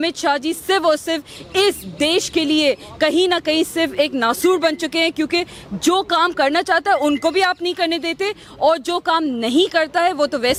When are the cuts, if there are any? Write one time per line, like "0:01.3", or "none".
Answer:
none